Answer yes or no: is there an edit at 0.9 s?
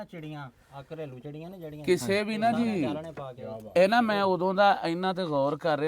no